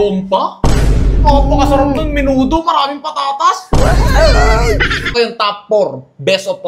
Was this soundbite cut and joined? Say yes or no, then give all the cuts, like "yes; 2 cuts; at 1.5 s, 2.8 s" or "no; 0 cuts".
yes; 1 cut; at 5.1 s